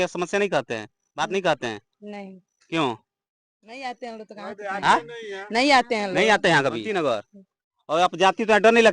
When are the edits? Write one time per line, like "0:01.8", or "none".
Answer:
0:06.8